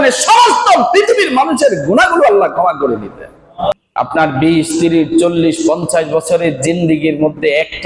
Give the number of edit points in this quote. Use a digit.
1